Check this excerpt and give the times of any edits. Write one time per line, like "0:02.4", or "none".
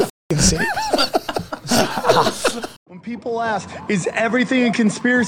0:02.7